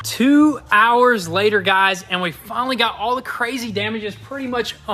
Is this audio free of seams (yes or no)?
yes